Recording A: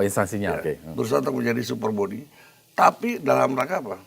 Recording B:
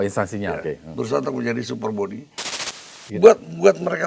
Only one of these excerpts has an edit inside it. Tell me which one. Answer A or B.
B